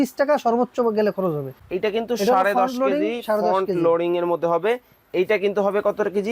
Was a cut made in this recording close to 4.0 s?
no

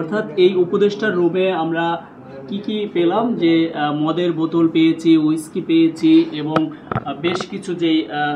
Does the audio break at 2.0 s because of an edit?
no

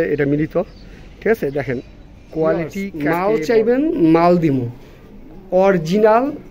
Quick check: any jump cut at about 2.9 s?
yes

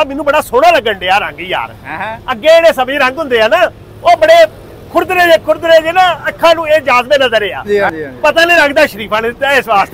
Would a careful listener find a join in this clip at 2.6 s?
no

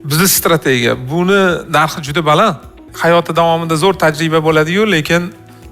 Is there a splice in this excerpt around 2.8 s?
yes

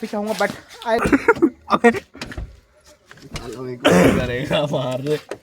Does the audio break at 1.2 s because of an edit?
yes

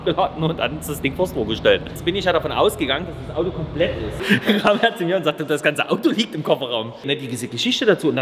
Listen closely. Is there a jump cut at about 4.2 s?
yes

